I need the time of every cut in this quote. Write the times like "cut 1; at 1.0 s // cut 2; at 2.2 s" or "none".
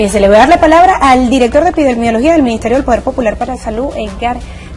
cut 1; at 1.6 s